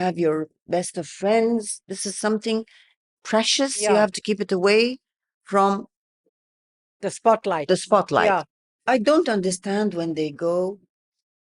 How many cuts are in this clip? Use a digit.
1